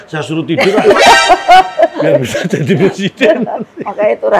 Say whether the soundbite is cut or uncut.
uncut